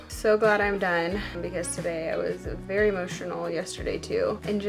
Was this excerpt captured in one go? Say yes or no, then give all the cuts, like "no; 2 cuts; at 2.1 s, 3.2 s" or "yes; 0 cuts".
yes; 0 cuts